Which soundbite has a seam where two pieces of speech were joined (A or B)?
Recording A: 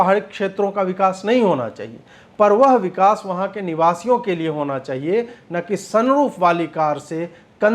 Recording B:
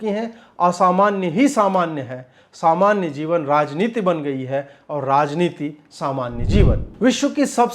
B